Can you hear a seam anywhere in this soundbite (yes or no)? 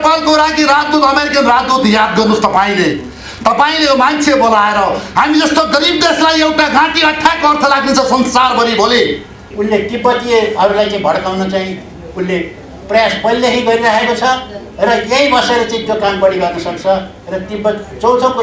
yes